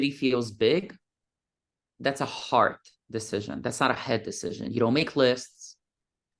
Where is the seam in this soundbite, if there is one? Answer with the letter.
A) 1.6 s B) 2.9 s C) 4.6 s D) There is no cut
D